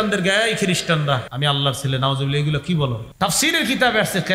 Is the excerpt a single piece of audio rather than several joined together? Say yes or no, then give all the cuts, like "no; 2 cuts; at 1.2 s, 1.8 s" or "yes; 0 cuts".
no; 2 cuts; at 1.3 s, 3.0 s